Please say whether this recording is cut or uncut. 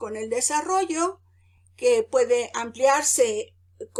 uncut